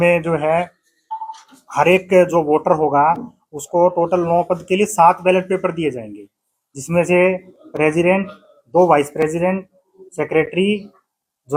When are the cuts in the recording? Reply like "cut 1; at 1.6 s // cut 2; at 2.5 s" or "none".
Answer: none